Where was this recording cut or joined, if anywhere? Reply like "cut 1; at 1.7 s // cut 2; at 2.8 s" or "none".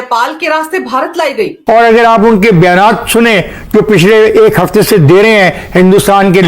cut 1; at 1.6 s